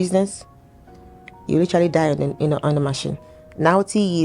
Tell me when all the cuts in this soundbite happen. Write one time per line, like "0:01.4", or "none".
0:03.2